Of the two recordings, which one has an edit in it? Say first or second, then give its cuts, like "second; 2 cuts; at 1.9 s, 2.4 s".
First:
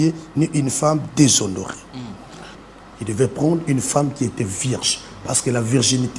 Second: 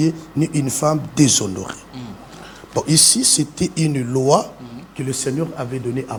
first; 1 cut; at 2.6 s